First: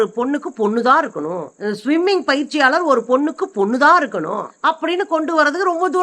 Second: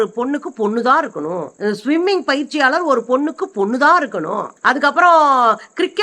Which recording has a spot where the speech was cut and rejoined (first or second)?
first